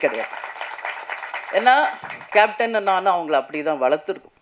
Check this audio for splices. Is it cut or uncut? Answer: uncut